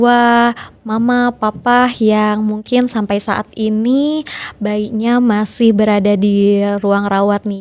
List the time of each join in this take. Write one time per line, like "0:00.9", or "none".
none